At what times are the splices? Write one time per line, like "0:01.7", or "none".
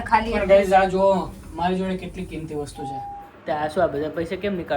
0:03.2